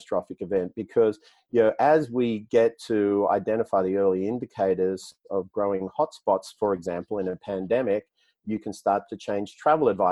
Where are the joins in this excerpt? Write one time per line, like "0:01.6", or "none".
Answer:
none